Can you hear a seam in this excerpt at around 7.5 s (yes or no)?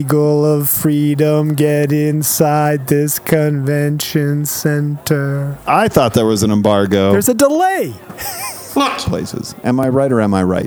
no